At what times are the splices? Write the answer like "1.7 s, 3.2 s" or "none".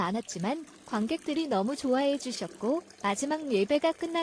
none